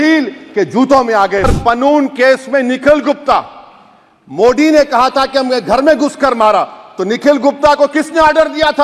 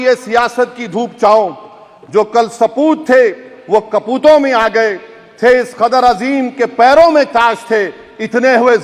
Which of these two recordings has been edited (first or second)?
first